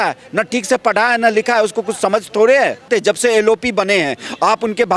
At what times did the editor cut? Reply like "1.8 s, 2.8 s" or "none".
2.9 s